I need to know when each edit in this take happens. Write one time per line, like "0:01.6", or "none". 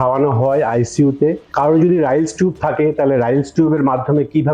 0:01.4

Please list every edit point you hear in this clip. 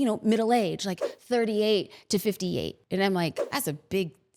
0:02.8
0:03.4

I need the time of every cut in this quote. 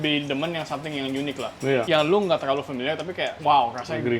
0:01.9
0:03.3

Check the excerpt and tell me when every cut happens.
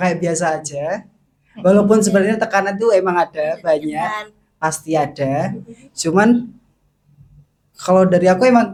none

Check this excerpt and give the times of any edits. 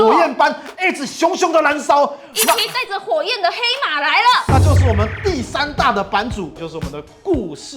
0:06.6

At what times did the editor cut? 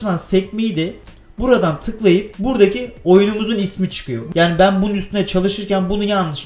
0:02.3
0:04.2

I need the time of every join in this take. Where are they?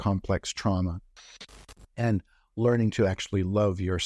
0:01.3

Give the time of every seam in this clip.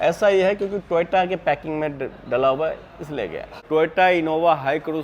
0:03.6

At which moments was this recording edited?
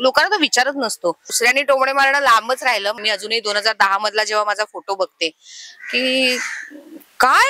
0:01.3
0:03.0

